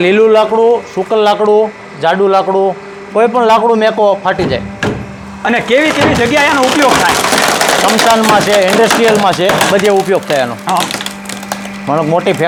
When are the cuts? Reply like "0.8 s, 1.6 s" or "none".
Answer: none